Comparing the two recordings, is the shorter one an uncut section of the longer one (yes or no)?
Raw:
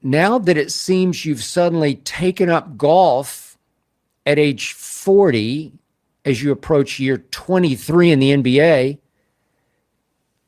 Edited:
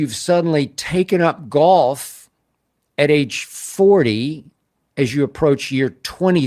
yes